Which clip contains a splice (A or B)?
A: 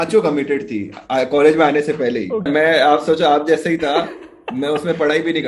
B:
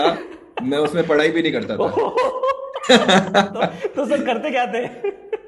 A